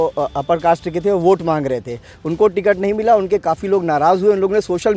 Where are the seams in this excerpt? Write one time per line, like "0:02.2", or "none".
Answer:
none